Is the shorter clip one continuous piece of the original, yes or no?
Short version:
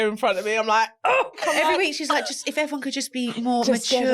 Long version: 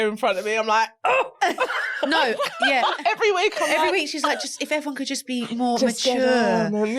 no